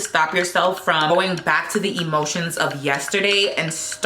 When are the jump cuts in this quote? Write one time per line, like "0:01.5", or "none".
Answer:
0:01.1